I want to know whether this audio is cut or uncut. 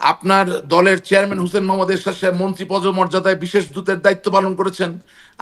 uncut